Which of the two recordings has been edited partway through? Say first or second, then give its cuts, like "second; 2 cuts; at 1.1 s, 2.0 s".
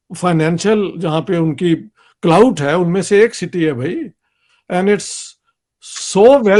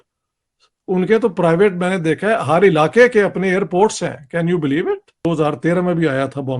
second; 1 cut; at 5.2 s